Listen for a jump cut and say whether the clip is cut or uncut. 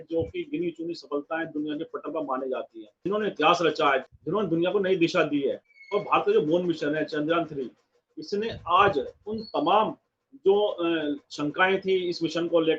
cut